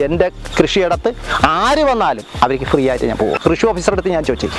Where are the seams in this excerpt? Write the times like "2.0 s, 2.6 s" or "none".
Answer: 3.4 s